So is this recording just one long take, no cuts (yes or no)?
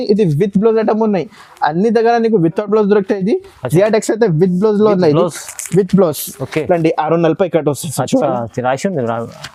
yes